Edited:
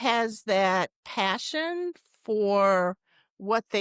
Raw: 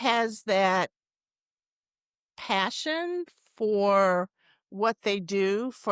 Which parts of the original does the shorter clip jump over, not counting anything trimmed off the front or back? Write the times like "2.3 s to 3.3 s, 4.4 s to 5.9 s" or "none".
1.0 s to 2.3 s